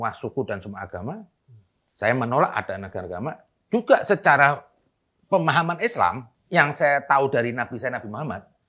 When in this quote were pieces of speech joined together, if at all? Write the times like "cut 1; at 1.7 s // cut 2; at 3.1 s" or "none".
cut 1; at 6.3 s